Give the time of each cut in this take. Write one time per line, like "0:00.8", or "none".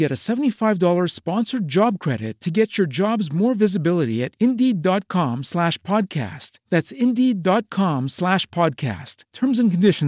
none